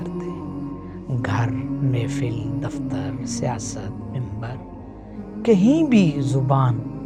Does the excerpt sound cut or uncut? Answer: uncut